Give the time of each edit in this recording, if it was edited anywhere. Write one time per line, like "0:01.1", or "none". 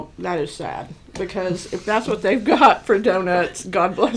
none